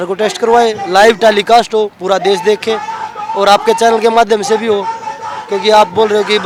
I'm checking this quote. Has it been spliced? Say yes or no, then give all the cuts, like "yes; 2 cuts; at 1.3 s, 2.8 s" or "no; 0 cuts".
no; 0 cuts